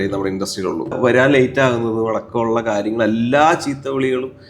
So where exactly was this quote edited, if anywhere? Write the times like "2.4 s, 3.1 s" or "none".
1.0 s